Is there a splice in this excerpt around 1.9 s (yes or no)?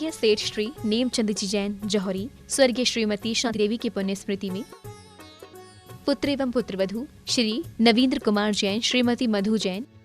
no